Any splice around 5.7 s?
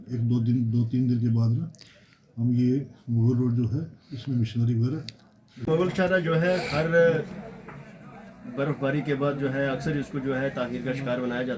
yes; 1 cut; at 5.7 s

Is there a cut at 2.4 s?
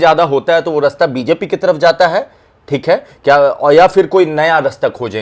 no; 0 cuts

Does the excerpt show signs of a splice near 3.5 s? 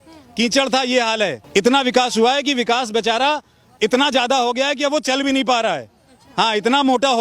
no; 1 cut; at 1.4 s

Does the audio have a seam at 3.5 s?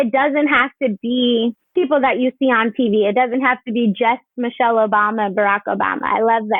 no; 1 cut; at 1.6 s

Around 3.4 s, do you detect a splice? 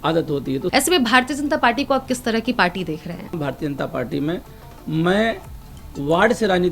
yes; 2 cuts; at 0.7 s, 3.4 s

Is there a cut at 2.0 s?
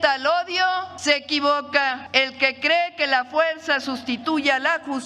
yes; 2 cuts; at 0.9 s, 2.0 s

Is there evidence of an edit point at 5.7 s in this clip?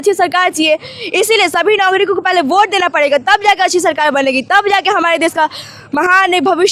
no; 0 cuts

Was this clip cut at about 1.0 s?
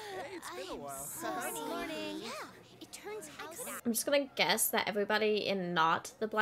no; 1 cut; at 3.8 s

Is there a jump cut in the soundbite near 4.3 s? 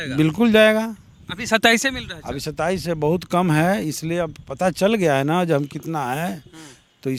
no; 0 cuts

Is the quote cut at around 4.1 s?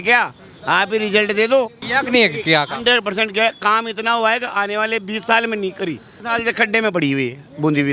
no; 2 cuts; at 1.8 s, 6.2 s

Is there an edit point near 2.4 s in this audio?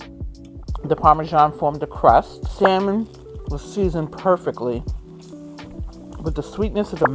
yes; 2 cuts; at 0.8 s, 2.4 s

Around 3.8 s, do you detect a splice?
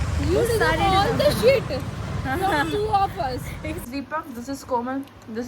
yes; 1 cut; at 3.8 s

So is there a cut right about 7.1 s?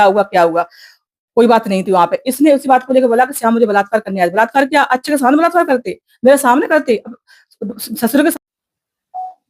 no; 1 cut; at 8.5 s

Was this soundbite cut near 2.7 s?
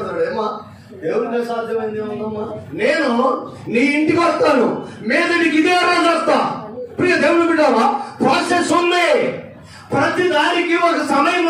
no; 0 cuts

